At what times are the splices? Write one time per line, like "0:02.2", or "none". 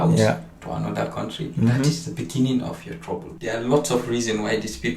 0:03.4